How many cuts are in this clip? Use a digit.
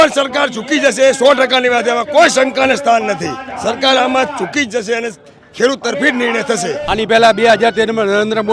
1